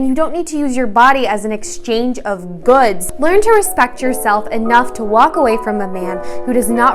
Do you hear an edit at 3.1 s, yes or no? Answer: yes